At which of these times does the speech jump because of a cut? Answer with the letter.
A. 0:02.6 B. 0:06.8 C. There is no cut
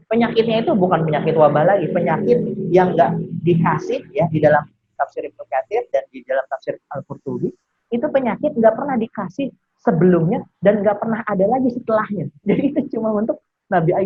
C